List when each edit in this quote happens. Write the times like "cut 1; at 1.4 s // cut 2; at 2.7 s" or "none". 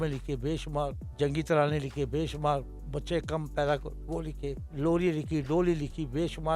cut 1; at 1.0 s // cut 2; at 4.6 s